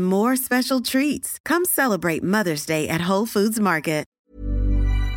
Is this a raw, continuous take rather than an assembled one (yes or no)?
no